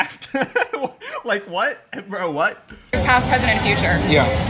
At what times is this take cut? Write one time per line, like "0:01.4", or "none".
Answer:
none